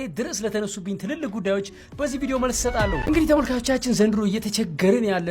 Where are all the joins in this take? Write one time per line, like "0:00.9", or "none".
0:03.0